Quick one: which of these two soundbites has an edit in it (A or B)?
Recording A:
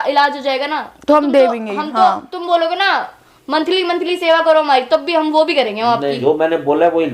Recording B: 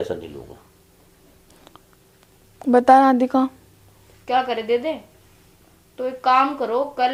A